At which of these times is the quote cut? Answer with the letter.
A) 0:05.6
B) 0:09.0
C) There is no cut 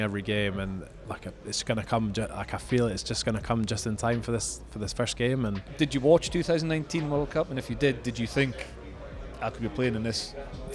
A